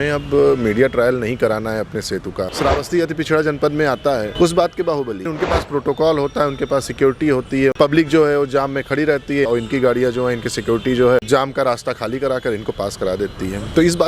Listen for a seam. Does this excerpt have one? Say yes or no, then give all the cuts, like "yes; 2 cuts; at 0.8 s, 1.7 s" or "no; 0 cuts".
yes; 6 cuts; at 2.4 s, 4.3 s, 5.3 s, 7.7 s, 9.5 s, 11.3 s